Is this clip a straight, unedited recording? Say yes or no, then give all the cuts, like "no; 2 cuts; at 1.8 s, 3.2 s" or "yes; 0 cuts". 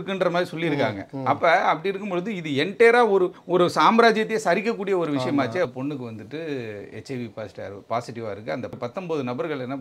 no; 3 cuts; at 3.4 s, 5.7 s, 8.7 s